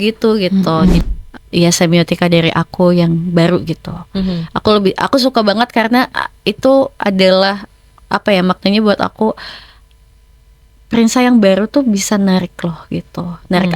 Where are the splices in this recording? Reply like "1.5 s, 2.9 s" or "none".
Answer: 1.1 s